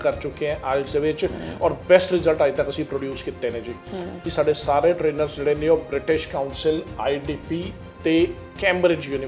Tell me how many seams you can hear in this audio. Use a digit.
1